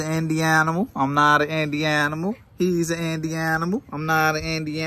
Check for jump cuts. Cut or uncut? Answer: uncut